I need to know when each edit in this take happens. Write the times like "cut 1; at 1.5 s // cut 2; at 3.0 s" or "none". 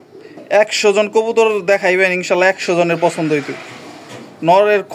none